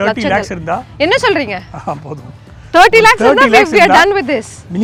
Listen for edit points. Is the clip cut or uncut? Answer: uncut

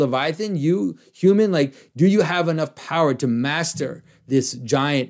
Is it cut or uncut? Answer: uncut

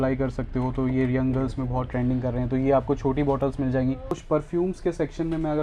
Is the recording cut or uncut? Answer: cut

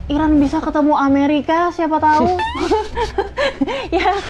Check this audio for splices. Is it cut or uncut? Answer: uncut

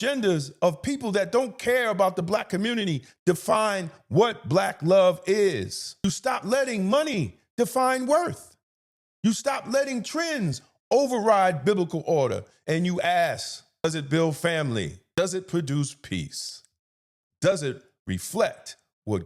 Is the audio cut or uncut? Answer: cut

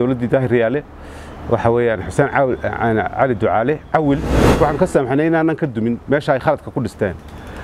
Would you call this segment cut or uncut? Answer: uncut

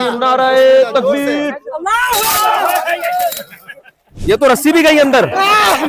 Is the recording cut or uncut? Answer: uncut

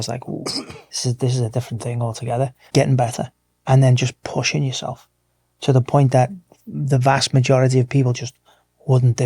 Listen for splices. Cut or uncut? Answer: cut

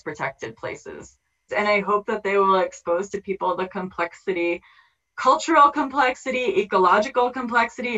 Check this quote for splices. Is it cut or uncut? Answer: cut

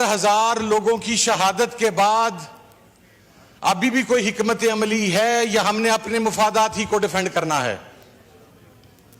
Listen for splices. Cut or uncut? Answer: uncut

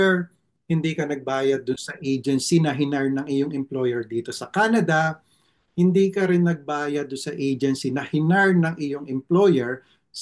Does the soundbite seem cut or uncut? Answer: uncut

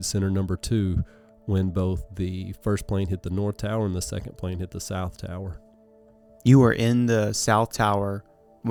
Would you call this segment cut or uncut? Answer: uncut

